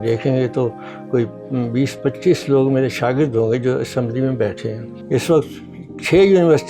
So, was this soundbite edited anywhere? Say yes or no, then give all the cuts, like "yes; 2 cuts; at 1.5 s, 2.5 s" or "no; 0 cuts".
no; 0 cuts